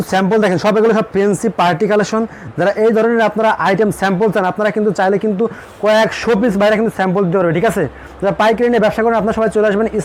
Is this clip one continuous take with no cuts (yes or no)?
yes